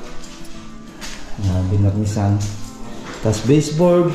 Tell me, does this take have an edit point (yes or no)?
no